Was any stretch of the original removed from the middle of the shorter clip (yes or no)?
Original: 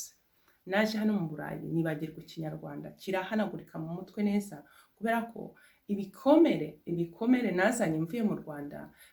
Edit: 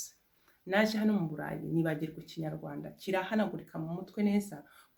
no